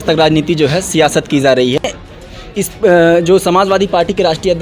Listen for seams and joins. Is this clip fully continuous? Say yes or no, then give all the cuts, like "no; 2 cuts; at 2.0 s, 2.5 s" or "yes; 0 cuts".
no; 1 cut; at 2.0 s